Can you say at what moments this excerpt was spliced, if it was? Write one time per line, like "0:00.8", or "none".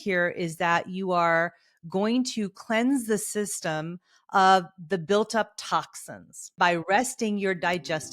0:06.5